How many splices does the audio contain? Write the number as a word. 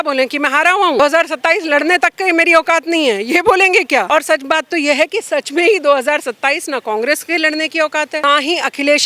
three